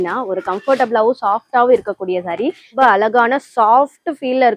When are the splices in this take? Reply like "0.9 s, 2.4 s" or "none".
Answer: 2.7 s